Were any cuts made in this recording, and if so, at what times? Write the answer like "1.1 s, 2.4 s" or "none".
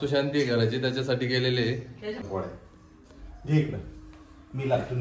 2.2 s